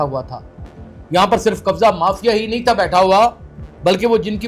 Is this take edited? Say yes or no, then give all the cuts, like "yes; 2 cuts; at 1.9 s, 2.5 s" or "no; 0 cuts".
no; 0 cuts